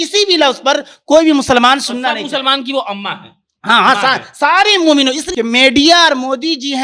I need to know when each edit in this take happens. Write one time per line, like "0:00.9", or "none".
0:05.2